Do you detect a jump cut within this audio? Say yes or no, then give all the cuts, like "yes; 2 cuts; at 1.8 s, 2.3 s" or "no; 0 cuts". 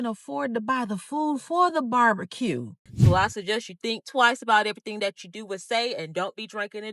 yes; 1 cut; at 2.9 s